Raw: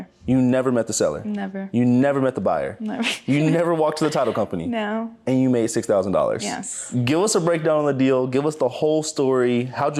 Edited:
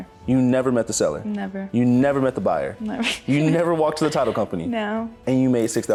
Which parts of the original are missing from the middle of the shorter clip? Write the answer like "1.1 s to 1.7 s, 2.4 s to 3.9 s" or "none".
none